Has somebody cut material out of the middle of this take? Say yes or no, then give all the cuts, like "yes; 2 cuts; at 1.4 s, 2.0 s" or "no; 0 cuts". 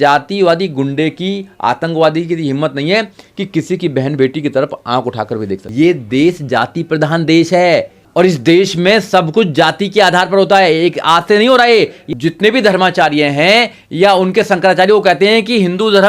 yes; 3 cuts; at 5.6 s, 8.0 s, 12.0 s